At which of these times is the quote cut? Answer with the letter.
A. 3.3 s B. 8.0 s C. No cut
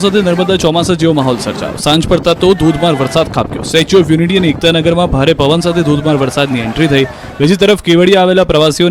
A